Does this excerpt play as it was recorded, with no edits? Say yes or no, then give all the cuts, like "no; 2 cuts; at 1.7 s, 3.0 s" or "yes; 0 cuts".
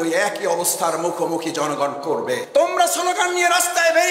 no; 1 cut; at 2.4 s